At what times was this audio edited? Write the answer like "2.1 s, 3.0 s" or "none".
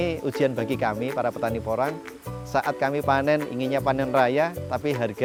none